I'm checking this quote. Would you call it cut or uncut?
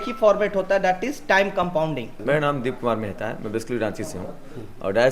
uncut